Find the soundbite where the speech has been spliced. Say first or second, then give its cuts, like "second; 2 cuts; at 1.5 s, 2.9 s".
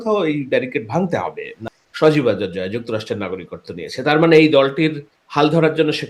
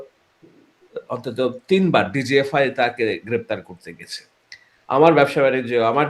first; 1 cut; at 1.5 s